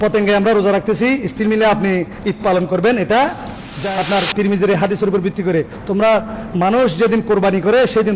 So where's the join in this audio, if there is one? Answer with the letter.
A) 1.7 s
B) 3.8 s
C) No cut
B